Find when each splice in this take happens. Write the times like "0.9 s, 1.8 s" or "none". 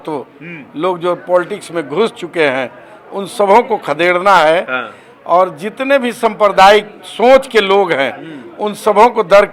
none